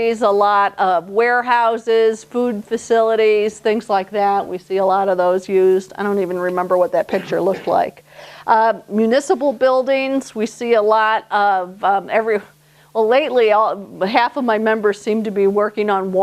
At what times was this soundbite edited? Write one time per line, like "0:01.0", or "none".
0:12.1